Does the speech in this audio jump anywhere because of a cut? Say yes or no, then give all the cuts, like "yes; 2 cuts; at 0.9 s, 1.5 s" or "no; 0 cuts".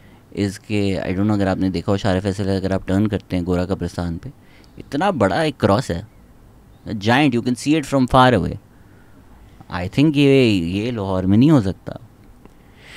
no; 0 cuts